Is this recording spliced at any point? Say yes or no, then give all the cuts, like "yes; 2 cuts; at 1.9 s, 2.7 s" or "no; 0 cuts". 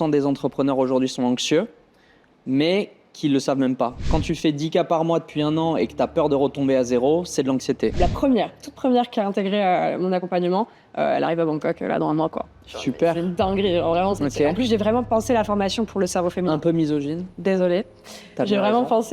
yes; 3 cuts; at 4.1 s, 8.0 s, 14.2 s